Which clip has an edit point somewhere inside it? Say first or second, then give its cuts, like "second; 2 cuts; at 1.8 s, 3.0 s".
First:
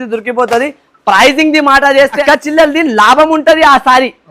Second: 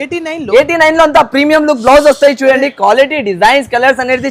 first; 1 cut; at 2.2 s